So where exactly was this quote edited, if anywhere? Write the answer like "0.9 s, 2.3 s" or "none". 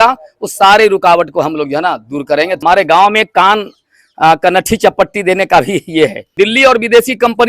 2.6 s, 6.3 s